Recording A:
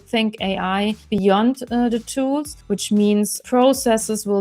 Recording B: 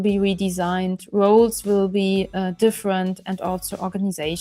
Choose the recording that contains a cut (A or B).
A